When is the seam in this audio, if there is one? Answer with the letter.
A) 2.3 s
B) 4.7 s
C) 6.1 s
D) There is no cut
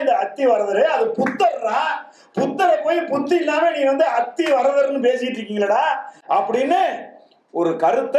D